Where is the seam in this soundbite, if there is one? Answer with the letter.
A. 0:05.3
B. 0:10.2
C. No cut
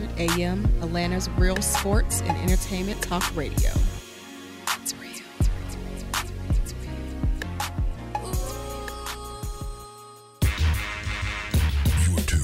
B